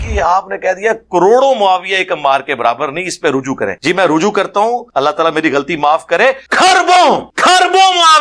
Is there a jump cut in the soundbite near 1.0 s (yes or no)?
no